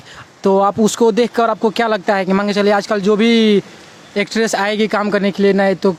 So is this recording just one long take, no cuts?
yes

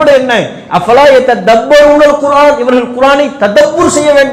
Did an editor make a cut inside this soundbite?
no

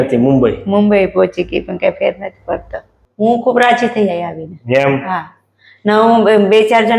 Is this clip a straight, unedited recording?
no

